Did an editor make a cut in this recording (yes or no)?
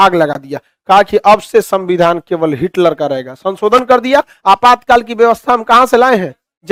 no